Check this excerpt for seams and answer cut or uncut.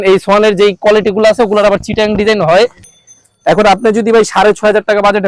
cut